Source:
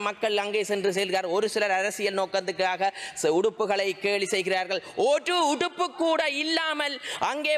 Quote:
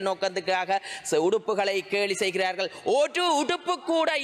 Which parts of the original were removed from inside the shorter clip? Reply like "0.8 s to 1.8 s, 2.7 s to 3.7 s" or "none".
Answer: none